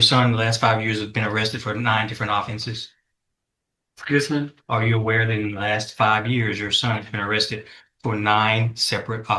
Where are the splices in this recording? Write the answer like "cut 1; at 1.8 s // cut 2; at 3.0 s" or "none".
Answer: none